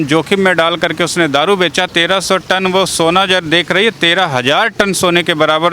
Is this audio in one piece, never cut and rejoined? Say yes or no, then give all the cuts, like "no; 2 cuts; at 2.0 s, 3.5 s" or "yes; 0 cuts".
no; 1 cut; at 1.9 s